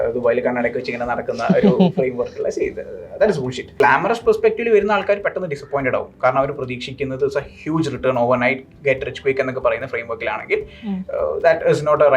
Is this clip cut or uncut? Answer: cut